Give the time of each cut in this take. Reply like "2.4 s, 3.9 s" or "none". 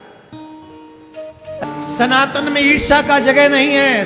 1.6 s